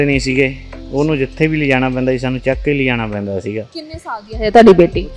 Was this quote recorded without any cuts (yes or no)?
yes